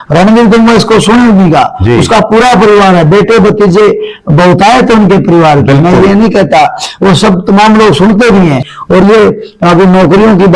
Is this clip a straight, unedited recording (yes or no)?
no